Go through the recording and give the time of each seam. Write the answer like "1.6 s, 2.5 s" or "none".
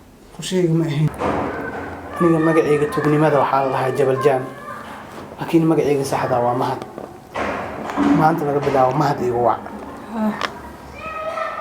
1.1 s